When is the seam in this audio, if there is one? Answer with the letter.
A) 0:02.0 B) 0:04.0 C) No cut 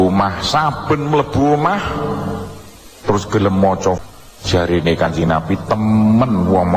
B